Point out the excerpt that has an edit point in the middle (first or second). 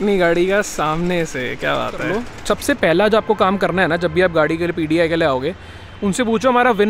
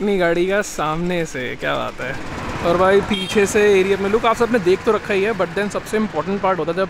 first